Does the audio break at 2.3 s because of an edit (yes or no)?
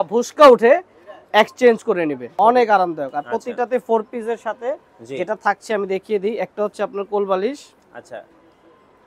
yes